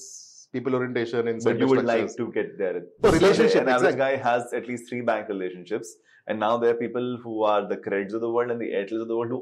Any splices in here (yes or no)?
yes